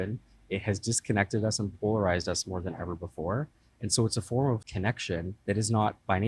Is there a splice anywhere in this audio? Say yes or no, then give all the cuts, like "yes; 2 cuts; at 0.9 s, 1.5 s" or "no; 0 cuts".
yes; 1 cut; at 5.3 s